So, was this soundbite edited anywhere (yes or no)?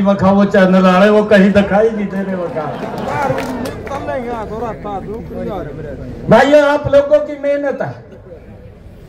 no